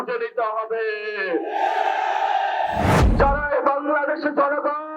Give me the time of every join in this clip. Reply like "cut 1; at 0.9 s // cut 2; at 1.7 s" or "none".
cut 1; at 3.0 s